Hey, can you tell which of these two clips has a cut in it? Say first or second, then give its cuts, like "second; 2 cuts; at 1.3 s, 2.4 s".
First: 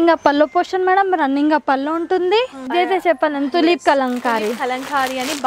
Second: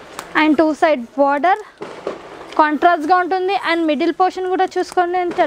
first; 1 cut; at 2.7 s